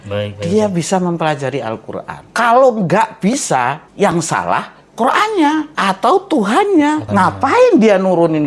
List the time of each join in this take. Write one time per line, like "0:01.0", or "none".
0:02.1
0:03.8
0:05.7
0:07.0